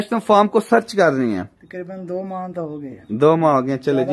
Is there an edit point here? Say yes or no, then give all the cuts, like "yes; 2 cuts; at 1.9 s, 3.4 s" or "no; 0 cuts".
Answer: no; 0 cuts